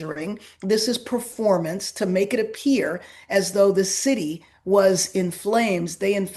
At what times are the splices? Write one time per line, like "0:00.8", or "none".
none